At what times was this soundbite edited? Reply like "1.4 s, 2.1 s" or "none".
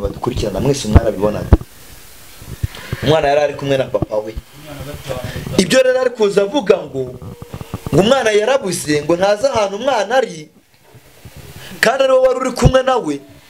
none

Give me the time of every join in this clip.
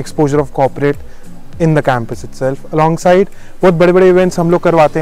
none

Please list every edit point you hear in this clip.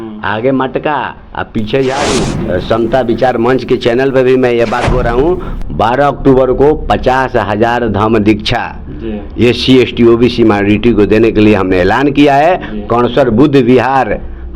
2.3 s

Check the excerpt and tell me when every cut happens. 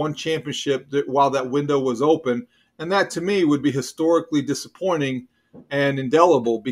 none

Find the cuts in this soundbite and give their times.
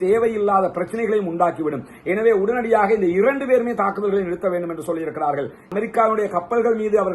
5.6 s

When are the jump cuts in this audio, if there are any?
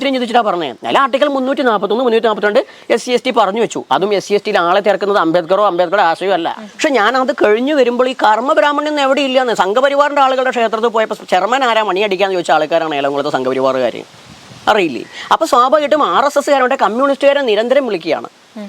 6.6 s

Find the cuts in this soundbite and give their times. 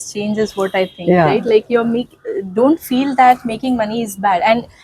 none

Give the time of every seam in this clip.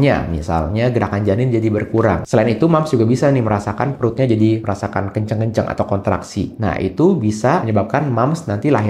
2.2 s, 4.6 s, 7.7 s

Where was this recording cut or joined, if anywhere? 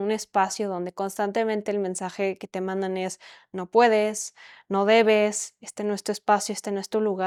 none

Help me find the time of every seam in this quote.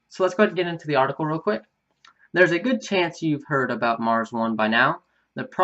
3.0 s

